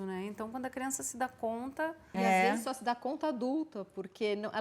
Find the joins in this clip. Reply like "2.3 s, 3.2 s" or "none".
2.1 s